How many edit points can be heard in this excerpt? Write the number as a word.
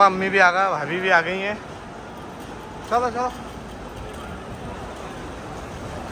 zero